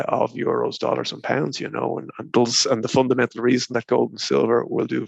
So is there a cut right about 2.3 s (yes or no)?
yes